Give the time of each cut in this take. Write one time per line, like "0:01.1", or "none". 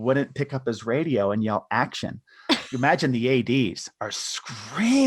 0:02.7